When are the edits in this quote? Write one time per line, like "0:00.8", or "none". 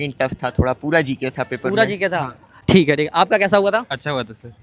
none